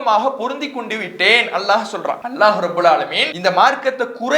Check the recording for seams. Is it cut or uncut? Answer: cut